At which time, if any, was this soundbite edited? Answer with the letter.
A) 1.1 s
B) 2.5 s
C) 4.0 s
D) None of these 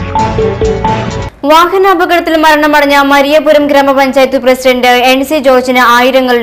A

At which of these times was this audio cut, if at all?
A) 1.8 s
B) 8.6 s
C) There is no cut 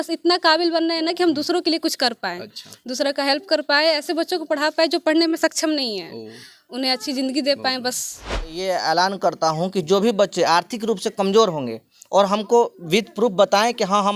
B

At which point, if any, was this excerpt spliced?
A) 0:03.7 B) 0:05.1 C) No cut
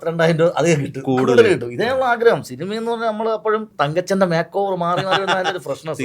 A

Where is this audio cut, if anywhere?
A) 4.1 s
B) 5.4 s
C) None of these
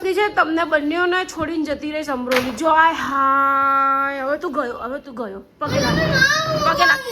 C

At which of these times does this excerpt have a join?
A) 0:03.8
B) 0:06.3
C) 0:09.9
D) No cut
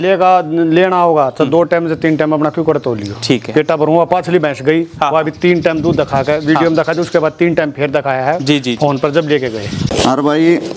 C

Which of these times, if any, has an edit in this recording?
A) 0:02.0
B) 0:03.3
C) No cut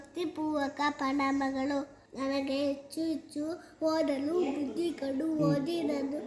A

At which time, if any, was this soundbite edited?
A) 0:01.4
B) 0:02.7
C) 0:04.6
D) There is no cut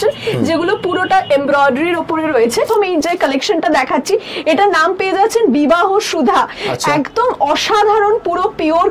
B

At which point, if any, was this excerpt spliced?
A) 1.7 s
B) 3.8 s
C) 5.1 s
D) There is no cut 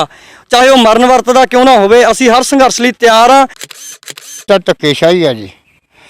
B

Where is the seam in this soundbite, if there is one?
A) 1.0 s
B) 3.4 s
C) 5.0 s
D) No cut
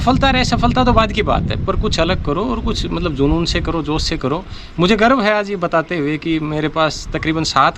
D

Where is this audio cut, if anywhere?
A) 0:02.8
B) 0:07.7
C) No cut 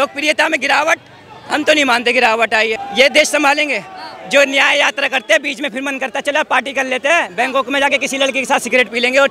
A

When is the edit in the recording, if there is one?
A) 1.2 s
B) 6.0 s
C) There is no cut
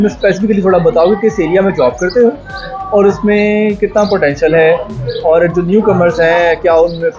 C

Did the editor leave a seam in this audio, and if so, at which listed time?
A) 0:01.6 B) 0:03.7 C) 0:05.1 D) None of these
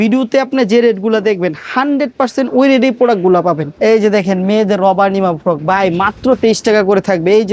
B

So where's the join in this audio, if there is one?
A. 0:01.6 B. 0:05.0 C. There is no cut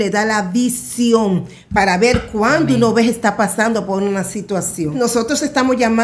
B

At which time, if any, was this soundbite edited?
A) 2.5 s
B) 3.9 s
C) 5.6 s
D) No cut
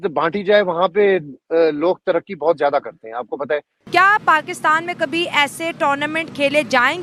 B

